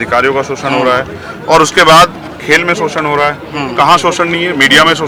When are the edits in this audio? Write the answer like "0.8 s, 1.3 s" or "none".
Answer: none